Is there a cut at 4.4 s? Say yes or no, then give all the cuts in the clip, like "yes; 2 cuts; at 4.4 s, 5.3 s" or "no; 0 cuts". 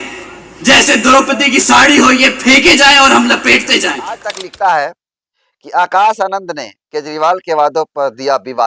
yes; 1 cut; at 4.4 s